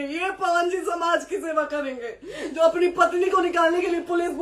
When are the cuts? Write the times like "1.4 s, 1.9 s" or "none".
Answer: none